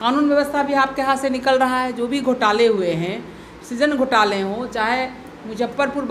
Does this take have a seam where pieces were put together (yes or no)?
no